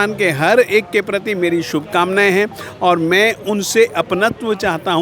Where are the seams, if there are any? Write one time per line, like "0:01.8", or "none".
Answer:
none